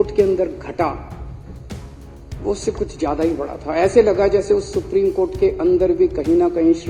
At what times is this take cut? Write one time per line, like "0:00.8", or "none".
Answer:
none